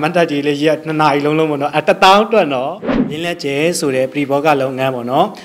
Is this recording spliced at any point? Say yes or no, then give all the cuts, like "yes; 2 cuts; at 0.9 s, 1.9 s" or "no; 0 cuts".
yes; 1 cut; at 3.2 s